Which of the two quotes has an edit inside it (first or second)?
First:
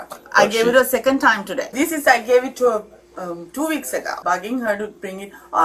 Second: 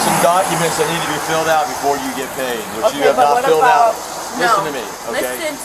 first